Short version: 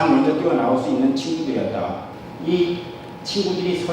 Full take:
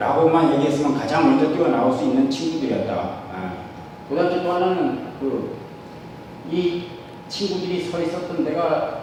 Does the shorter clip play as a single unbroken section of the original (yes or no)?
no